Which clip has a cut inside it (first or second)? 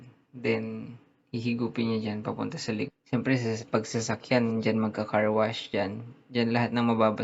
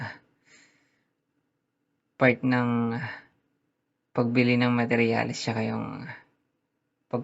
first